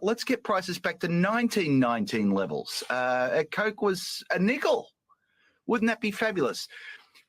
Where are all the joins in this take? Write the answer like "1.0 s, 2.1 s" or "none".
5.9 s

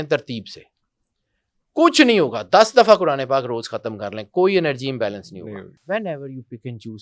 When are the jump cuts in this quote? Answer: 5.8 s

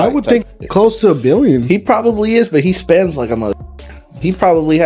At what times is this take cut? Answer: none

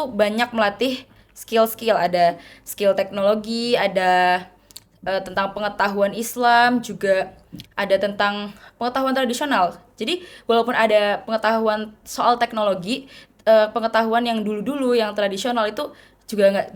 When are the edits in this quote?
none

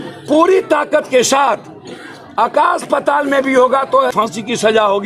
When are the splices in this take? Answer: 4.1 s

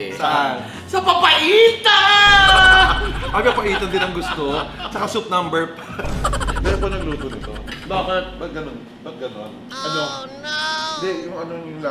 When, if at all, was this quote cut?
6.5 s

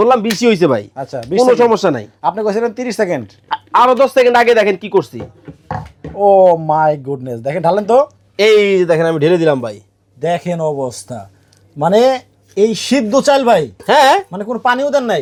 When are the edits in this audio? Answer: none

